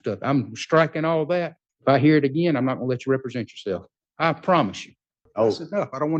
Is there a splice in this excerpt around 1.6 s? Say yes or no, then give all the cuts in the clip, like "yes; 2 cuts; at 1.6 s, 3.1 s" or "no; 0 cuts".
yes; 3 cuts; at 1.6 s, 4.0 s, 5.2 s